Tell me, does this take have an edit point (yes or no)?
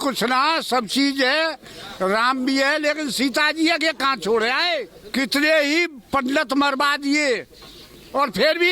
yes